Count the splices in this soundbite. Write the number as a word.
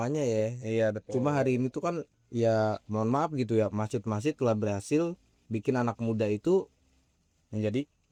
zero